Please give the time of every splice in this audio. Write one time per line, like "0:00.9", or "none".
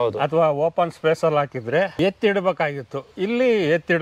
0:01.9